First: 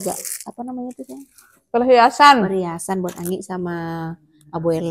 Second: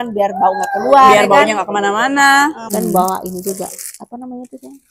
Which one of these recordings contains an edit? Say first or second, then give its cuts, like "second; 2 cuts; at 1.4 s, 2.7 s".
second; 1 cut; at 2.6 s